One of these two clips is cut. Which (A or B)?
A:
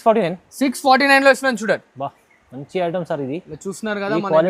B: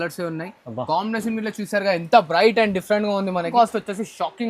B